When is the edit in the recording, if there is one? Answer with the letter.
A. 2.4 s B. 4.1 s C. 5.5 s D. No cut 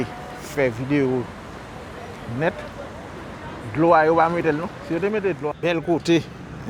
C